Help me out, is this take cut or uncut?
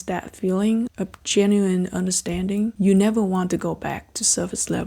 cut